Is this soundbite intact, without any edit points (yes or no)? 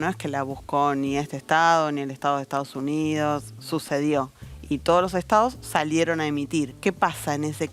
no